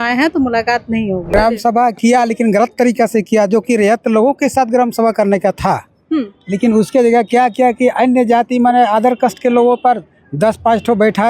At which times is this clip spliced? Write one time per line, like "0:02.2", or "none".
0:01.3